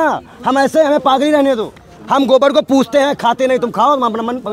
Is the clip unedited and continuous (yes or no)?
yes